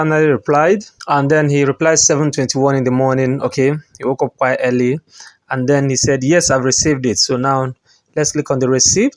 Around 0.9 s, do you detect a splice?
yes; 1 cut; at 0.9 s

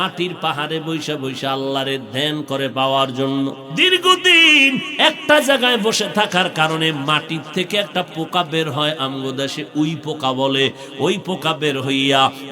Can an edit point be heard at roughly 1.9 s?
no; 1 cut; at 3.7 s

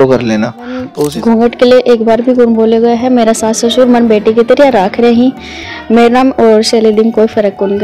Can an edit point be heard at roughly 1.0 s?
yes; 1 cut; at 1.0 s

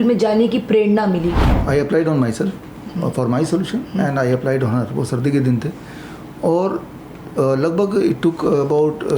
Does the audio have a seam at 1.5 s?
yes; 1 cut; at 1.5 s

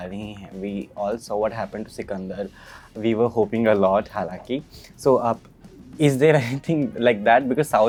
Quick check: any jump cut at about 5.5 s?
no; 0 cuts

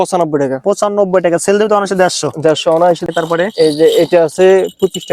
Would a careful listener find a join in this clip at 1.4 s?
no; 1 cut; at 3.0 s

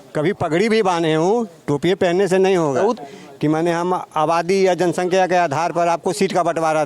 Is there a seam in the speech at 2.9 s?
yes; 1 cut; at 2.9 s

